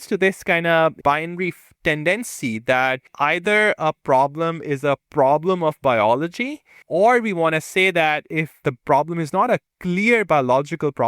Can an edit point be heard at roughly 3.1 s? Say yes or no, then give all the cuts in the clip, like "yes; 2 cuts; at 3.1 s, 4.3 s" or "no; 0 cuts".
yes; 4 cuts; at 1.0 s, 3.1 s, 6.7 s, 8.6 s